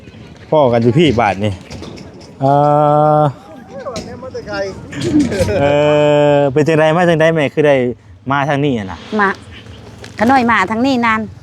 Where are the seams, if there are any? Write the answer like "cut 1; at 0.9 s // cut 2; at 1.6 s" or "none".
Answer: cut 1; at 5.6 s